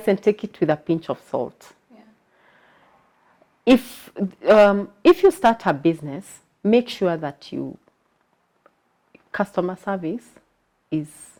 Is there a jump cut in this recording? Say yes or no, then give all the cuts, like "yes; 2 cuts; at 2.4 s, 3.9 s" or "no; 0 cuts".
no; 0 cuts